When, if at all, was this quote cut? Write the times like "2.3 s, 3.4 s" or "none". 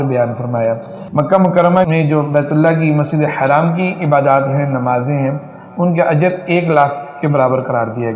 0.9 s, 1.9 s